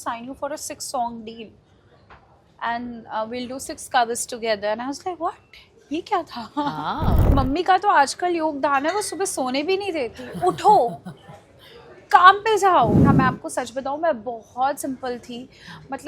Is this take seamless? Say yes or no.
no